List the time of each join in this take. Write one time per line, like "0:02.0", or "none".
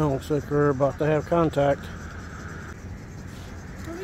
0:02.7